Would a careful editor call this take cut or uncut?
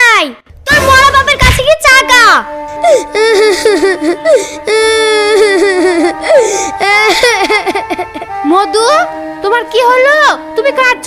uncut